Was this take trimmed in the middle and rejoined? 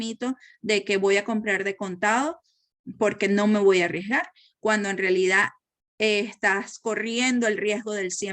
no; 0 cuts

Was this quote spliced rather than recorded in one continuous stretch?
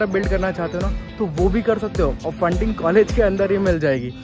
no; 0 cuts

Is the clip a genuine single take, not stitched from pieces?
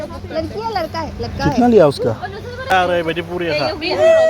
no; 1 cut; at 2.7 s

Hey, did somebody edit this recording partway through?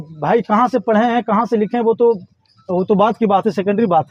no; 0 cuts

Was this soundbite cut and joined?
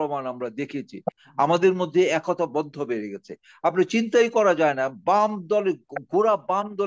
yes; 1 cut; at 1.2 s

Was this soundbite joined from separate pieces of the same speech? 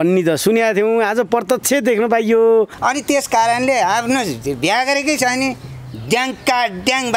yes; 1 cut; at 2.8 s

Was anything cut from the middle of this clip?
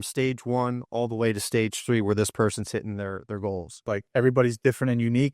yes; 1 cut; at 4.0 s

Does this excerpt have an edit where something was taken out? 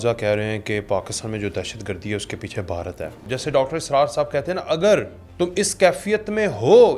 yes; 2 cuts; at 3.2 s, 5.2 s

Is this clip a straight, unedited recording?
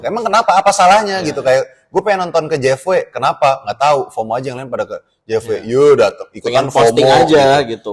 yes; 0 cuts

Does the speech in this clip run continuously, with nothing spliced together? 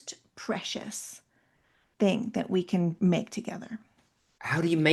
no; 1 cut; at 3.0 s

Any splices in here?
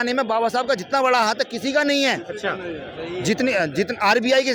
no; 0 cuts

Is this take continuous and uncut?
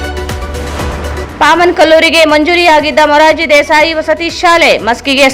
no; 1 cut; at 1.0 s

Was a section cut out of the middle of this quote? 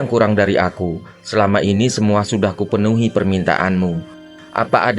no; 0 cuts

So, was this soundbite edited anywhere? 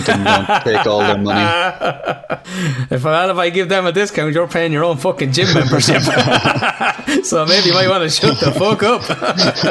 yes; 1 cut; at 2.4 s

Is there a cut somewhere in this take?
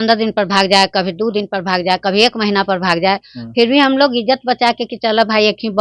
no; 0 cuts

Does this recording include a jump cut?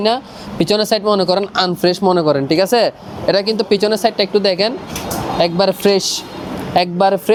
no; 0 cuts

